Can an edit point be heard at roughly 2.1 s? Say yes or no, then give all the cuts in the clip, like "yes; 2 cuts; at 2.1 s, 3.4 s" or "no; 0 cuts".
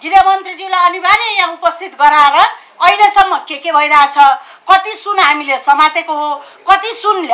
no; 0 cuts